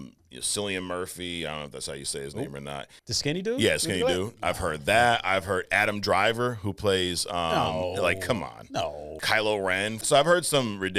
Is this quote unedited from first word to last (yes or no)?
no